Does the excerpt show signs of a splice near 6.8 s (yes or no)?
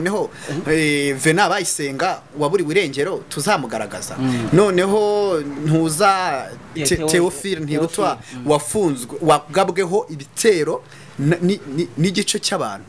yes